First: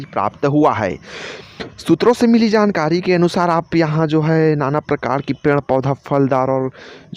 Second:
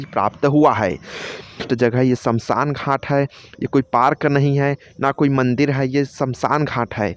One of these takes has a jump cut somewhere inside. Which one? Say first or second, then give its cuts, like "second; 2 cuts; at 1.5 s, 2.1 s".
second; 1 cut; at 1.7 s